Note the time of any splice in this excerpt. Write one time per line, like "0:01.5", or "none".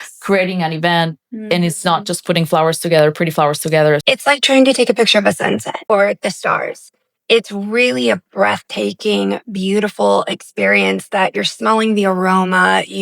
0:04.0
0:05.8